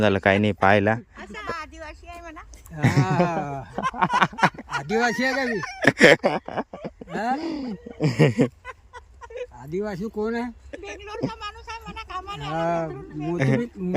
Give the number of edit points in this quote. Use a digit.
1